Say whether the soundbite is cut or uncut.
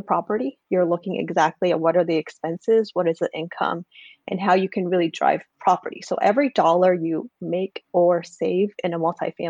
uncut